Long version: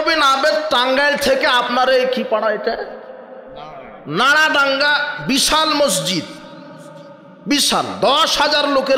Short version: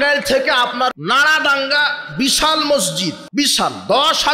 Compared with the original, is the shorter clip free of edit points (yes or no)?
no